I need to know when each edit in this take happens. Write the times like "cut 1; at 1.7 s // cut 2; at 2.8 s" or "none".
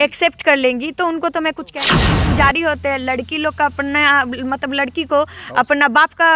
cut 1; at 2.0 s